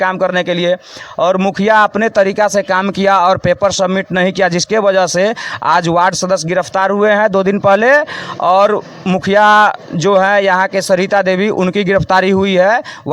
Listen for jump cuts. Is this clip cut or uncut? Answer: uncut